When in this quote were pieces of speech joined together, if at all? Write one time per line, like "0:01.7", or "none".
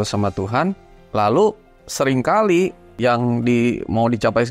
0:00.9
0:02.9